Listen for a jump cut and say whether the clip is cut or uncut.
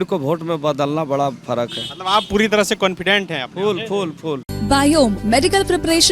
uncut